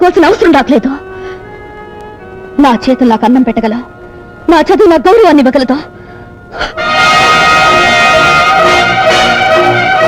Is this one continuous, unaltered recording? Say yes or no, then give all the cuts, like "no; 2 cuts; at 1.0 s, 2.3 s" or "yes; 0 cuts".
yes; 0 cuts